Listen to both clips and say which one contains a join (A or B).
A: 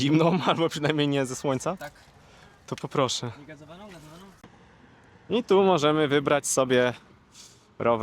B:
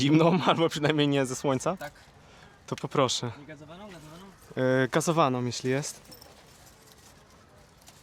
A